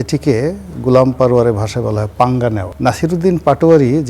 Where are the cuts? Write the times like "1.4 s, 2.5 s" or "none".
2.7 s